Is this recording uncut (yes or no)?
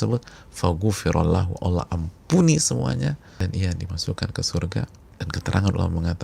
no